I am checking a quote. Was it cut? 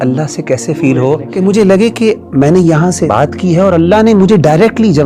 yes; 2 cuts; at 1.3 s, 3.1 s

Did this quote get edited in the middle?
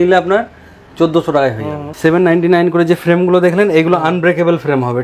yes; 1 cut; at 1.8 s

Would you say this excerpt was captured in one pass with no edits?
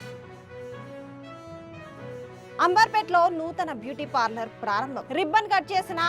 no; 1 cut; at 0.9 s

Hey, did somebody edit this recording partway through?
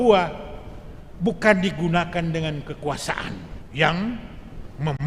yes; 1 cut; at 3.6 s

